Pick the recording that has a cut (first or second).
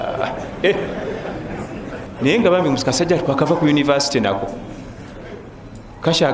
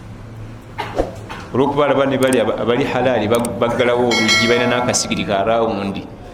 first